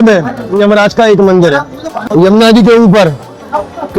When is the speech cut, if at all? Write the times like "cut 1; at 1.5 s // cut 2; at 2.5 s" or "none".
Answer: cut 1; at 1.9 s